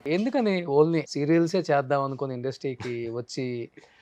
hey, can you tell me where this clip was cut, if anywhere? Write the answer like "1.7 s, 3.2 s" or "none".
1.1 s